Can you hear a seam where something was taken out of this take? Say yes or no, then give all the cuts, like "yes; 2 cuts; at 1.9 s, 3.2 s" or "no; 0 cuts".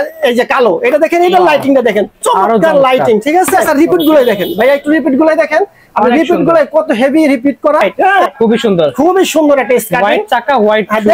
yes; 2 cuts; at 3.7 s, 7.9 s